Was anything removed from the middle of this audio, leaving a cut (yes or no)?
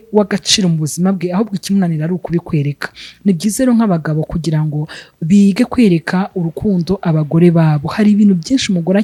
no